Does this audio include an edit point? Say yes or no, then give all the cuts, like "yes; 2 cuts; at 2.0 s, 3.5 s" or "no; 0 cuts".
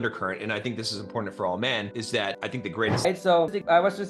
yes; 1 cut; at 3.0 s